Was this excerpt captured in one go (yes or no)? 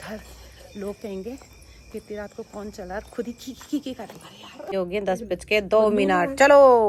no